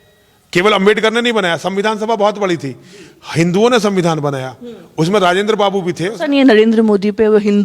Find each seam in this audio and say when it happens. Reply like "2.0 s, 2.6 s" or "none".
6.1 s